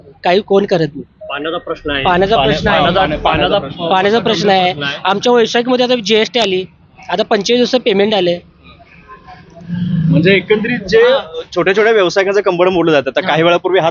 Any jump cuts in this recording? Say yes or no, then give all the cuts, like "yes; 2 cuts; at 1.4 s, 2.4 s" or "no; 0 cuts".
no; 0 cuts